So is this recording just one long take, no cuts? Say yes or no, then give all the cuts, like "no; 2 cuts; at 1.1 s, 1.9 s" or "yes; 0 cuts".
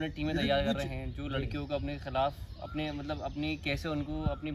yes; 0 cuts